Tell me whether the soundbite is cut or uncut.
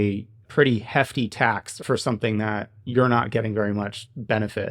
cut